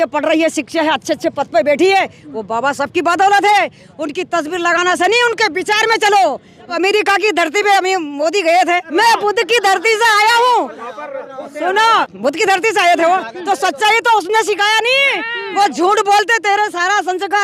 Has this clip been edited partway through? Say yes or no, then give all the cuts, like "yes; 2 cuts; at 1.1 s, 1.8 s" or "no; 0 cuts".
yes; 3 cuts; at 6.7 s, 8.9 s, 12.1 s